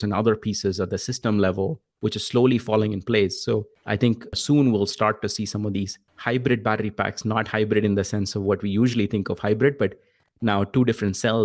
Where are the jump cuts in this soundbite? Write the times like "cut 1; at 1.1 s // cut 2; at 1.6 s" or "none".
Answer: cut 1; at 4.3 s // cut 2; at 6.0 s

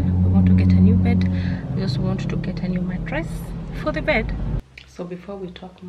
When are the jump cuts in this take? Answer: cut 1; at 4.6 s

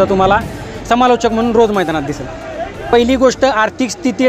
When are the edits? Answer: cut 1; at 2.8 s

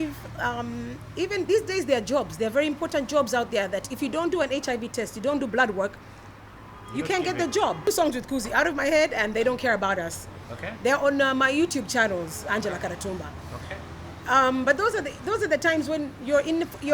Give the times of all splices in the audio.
cut 1; at 7.9 s

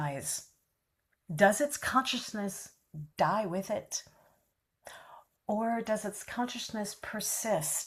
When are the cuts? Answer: none

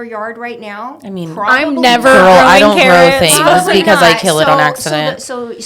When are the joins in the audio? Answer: none

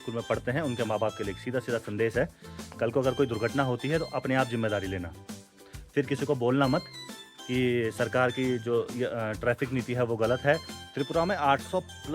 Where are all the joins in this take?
cut 1; at 10.8 s

